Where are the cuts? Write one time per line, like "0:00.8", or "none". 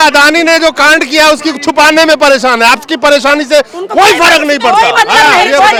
none